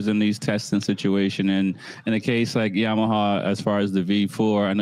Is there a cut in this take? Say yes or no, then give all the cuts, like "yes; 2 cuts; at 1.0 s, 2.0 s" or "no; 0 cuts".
no; 0 cuts